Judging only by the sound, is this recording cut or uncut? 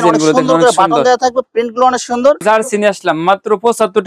cut